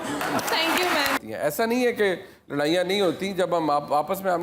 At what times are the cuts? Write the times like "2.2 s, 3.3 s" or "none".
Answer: 1.2 s